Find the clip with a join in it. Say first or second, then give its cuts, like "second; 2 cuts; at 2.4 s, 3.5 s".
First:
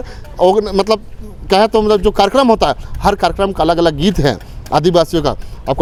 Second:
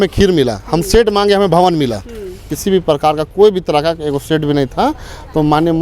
second; 1 cut; at 2.5 s